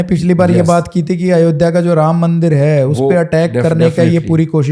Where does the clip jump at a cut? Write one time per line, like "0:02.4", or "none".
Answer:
none

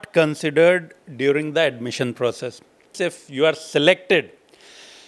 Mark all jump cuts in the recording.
0:02.9

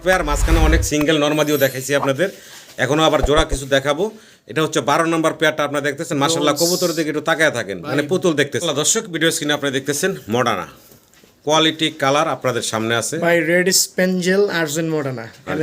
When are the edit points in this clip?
0:08.6

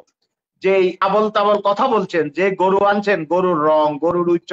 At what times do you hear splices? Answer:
0:01.0

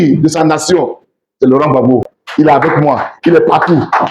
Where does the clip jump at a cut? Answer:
0:02.2

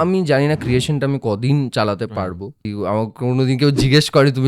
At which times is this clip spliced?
0:02.6

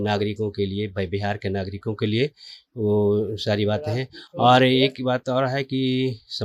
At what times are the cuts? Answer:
none

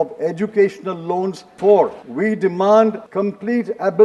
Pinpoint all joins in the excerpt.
0:01.4
0:02.0
0:03.1

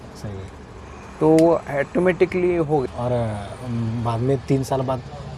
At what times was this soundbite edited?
0:02.8

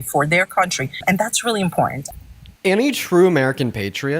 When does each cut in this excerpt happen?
0:01.0
0:02.0

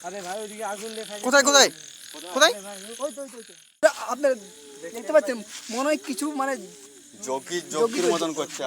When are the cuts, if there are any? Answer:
0:03.8

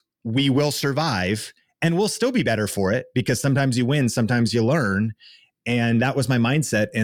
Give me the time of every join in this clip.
none

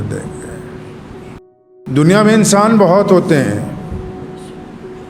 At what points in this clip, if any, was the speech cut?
0:01.6

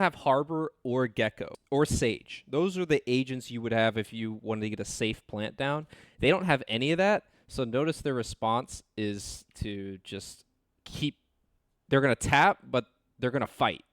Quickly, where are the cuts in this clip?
0:01.5

